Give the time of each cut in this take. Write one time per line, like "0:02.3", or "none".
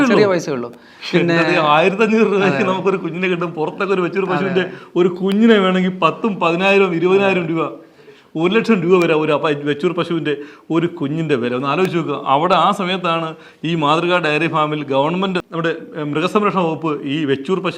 none